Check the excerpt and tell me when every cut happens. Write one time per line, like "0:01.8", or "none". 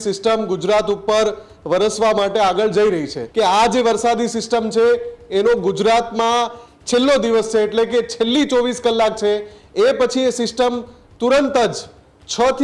0:03.2